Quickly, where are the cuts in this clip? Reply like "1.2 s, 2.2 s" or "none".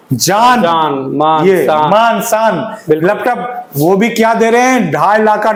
none